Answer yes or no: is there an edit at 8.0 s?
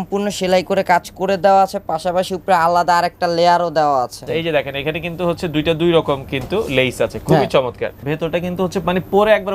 yes